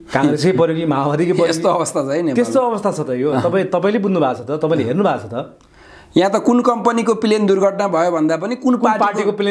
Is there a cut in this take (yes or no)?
no